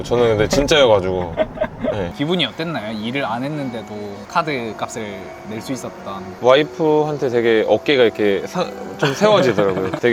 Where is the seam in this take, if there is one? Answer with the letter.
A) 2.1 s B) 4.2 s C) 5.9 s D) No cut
A